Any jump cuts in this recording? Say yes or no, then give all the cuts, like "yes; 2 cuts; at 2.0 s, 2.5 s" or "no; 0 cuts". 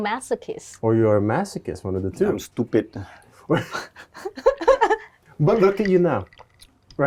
no; 0 cuts